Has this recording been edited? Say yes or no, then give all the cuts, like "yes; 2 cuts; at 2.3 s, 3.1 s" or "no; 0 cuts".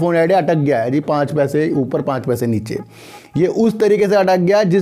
no; 0 cuts